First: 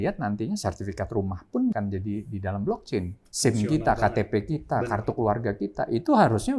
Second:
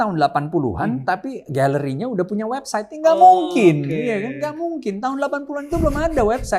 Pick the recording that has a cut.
first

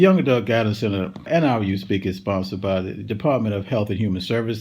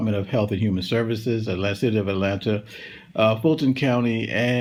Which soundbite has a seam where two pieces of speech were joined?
first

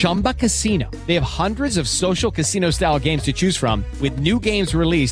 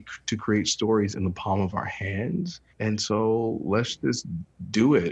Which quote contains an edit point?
second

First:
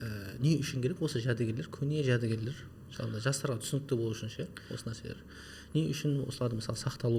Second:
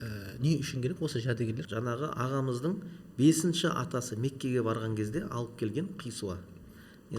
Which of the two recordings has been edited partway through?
second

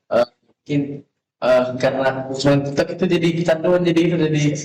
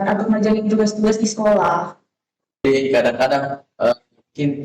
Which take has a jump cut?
second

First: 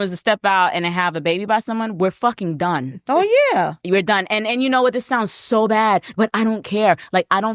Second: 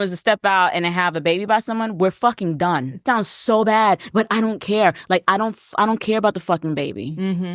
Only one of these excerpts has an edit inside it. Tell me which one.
second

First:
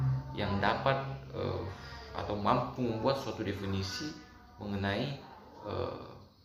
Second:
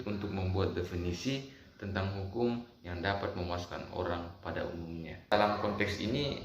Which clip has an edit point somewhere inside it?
second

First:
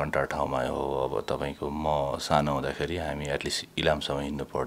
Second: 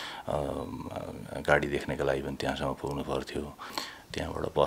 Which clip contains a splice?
second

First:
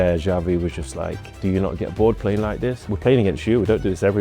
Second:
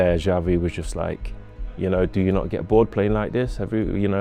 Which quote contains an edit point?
first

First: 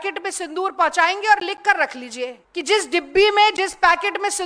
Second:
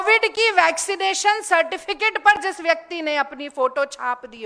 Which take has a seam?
first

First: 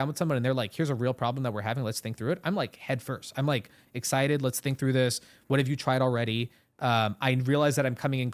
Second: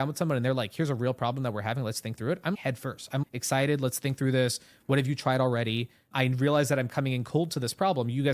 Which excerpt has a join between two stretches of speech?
second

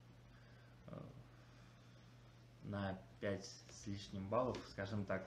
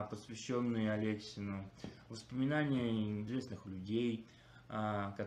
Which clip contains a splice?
second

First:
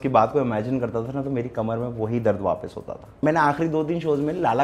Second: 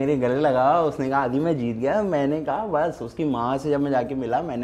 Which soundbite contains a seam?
first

